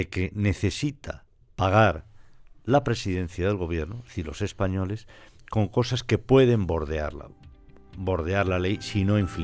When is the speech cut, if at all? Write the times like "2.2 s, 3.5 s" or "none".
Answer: none